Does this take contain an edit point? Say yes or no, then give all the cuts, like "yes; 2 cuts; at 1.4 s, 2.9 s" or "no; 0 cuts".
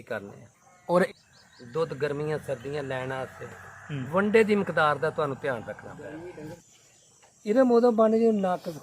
yes; 2 cuts; at 1.1 s, 6.6 s